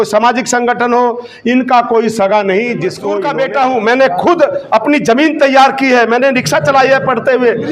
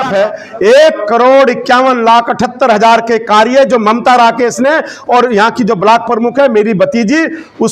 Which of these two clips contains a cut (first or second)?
first